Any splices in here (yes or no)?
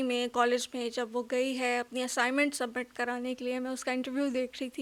no